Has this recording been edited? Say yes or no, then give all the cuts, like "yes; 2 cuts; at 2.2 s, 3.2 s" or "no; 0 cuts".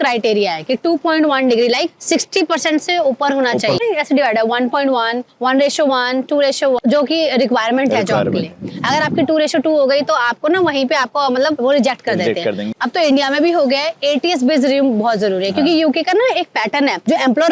yes; 3 cuts; at 3.8 s, 6.8 s, 12.7 s